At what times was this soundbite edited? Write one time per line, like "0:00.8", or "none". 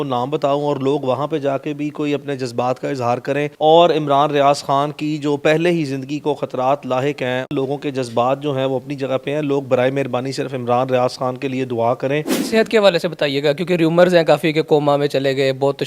0:03.5
0:07.5
0:12.4